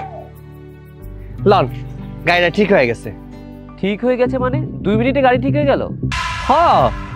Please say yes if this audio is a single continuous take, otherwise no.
no